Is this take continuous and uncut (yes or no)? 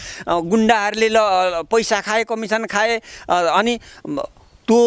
yes